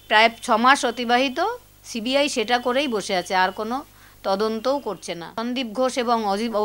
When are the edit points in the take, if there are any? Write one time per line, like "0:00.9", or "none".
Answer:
0:05.4